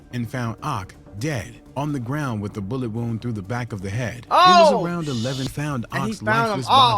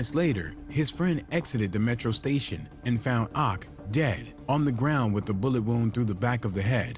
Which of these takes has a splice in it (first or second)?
first